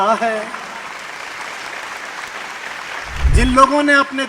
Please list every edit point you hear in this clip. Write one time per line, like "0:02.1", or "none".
0:03.1